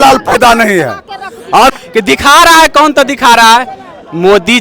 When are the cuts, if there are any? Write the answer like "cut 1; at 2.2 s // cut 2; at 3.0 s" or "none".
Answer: cut 1; at 1.7 s